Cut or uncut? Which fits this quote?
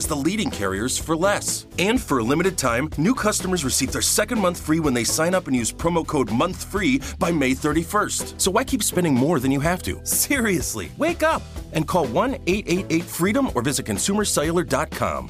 uncut